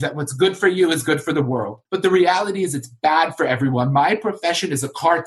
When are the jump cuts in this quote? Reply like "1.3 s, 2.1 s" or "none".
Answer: 1.8 s